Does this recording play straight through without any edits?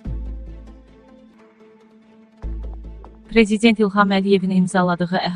no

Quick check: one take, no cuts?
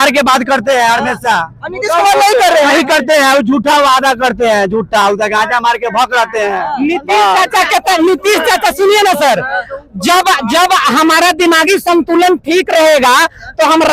yes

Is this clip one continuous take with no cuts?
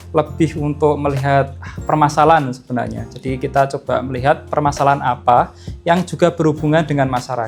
yes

